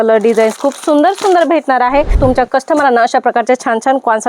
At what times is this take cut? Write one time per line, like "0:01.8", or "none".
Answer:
0:02.2